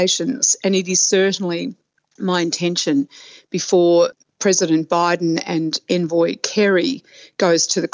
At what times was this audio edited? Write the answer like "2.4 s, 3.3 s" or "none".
none